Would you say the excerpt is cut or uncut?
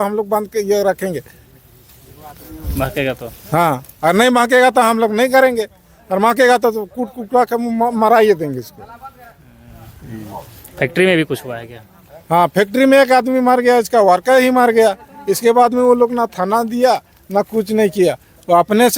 uncut